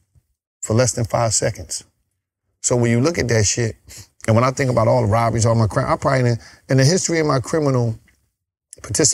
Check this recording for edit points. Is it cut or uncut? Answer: uncut